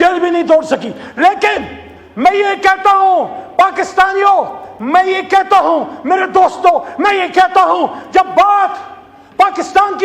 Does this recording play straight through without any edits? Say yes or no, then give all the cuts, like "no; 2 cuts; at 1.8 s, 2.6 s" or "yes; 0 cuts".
yes; 0 cuts